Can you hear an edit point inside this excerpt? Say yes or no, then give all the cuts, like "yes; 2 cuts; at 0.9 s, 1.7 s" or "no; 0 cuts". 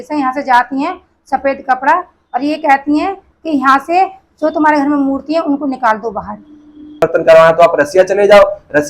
yes; 1 cut; at 7.0 s